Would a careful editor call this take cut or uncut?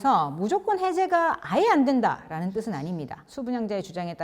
cut